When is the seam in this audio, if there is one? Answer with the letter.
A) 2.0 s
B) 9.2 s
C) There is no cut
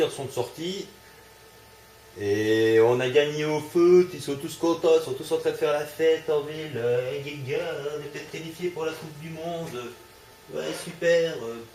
C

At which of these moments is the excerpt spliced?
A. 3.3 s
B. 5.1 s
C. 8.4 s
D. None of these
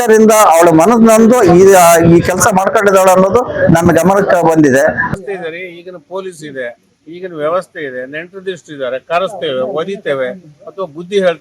B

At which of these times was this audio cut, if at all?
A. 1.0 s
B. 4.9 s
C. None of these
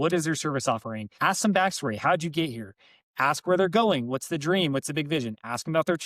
A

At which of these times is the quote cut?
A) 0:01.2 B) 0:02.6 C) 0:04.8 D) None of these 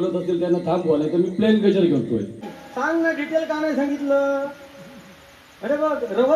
B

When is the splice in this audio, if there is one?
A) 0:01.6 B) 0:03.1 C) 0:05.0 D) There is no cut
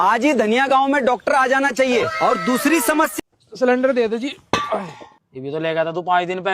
B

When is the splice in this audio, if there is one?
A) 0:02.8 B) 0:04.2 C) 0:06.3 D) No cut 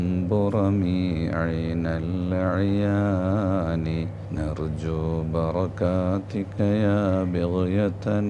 B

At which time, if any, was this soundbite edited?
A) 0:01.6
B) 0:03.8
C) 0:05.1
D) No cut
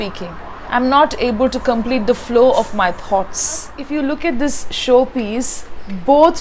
B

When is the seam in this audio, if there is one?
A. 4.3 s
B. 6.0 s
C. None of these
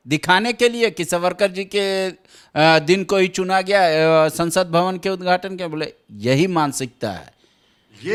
C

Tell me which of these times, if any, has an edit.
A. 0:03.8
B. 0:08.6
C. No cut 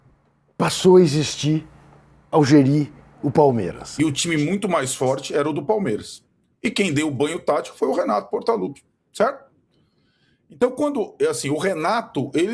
A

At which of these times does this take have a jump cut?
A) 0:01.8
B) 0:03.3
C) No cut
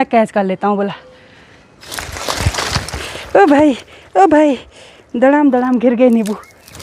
A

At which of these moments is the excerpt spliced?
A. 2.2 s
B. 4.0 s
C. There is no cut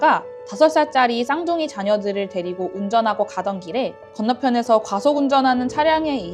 B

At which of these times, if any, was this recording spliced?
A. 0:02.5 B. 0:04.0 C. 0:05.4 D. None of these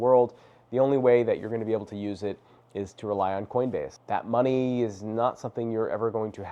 B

